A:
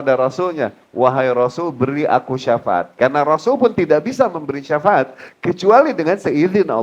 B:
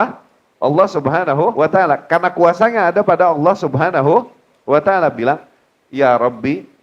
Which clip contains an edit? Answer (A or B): B